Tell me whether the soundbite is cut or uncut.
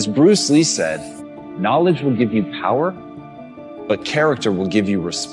uncut